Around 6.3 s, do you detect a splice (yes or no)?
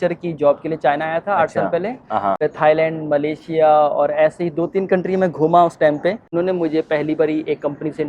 yes